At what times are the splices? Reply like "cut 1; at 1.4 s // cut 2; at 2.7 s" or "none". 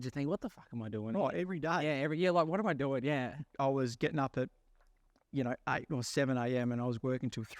cut 1; at 3.4 s